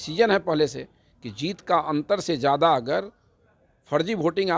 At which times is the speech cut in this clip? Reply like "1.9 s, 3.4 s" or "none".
none